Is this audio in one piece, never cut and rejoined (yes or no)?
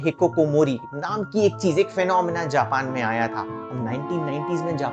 yes